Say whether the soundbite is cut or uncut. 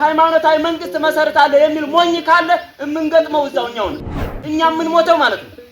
cut